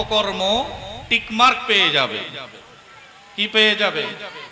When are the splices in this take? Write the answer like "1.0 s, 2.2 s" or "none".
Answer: none